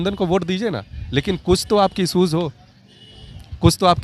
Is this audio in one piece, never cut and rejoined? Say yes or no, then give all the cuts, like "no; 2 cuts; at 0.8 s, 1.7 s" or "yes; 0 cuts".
yes; 0 cuts